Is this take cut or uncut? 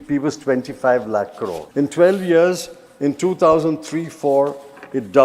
cut